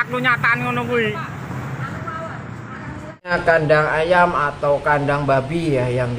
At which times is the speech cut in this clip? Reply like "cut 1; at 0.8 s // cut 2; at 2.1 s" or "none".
cut 1; at 3.3 s